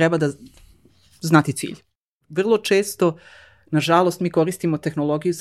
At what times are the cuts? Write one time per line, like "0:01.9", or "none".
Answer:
0:01.9